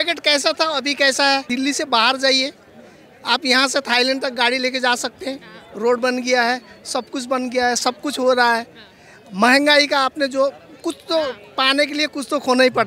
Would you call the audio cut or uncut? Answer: cut